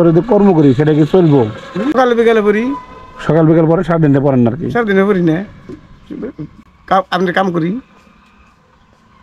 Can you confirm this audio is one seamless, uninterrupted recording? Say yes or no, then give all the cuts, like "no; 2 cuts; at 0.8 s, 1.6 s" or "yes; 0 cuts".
no; 1 cut; at 2.0 s